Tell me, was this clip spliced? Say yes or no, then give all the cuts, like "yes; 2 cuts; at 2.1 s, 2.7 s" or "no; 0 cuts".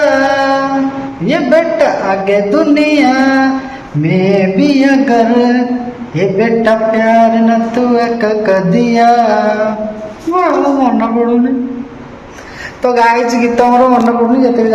no; 0 cuts